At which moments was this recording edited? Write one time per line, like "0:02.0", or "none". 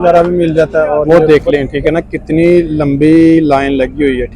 0:01.1